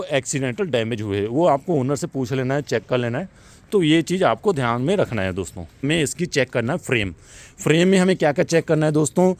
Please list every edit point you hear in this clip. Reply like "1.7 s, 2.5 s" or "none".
none